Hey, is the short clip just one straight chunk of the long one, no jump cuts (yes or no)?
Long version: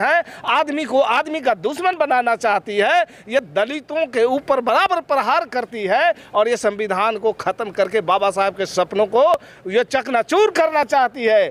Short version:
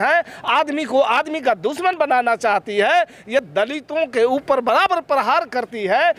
yes